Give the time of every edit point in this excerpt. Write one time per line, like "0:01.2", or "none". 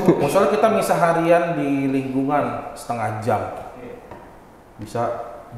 none